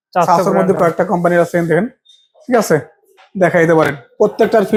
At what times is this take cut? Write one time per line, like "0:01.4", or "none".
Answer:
none